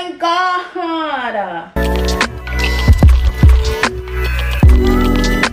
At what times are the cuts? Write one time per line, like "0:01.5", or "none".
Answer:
none